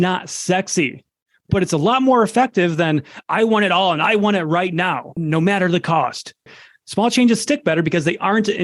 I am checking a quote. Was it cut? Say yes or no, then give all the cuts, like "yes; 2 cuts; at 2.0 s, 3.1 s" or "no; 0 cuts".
yes; 2 cuts; at 5.1 s, 6.6 s